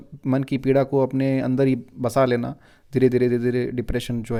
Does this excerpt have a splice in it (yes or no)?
no